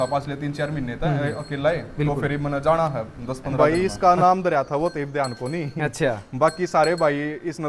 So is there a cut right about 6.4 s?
no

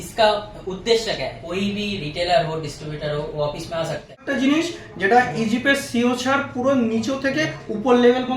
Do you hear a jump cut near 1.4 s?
yes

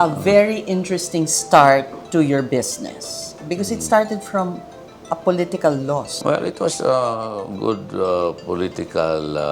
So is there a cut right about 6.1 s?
yes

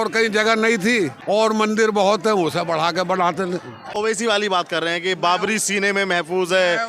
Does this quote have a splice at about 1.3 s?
yes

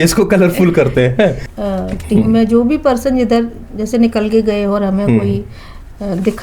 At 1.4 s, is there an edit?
yes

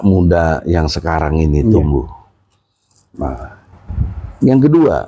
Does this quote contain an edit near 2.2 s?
no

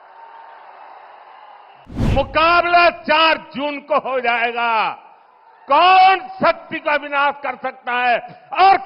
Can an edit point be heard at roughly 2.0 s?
yes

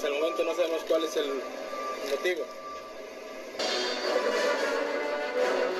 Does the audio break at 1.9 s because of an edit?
no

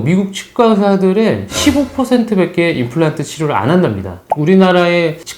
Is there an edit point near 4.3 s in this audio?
yes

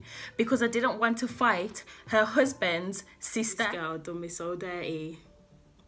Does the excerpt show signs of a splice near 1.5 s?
no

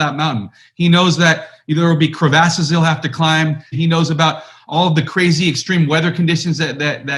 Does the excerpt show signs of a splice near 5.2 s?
no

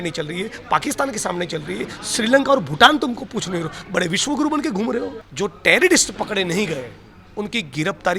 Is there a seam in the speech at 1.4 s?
no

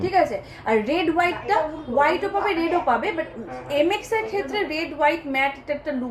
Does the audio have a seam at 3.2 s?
no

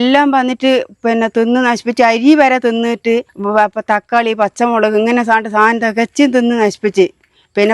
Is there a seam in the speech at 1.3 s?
no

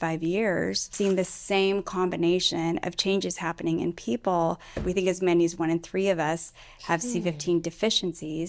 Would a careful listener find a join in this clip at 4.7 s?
yes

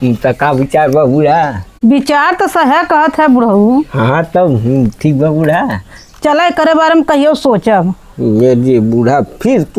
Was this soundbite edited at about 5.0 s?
no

